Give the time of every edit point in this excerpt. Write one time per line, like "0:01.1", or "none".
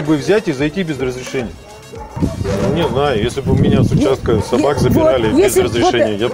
0:02.2